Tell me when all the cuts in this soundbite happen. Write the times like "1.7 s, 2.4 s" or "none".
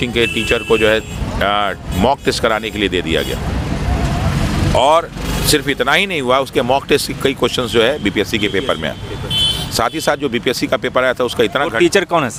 none